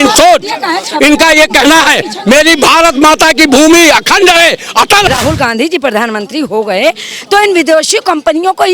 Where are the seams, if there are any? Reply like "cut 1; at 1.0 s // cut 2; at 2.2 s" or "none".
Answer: cut 1; at 5.1 s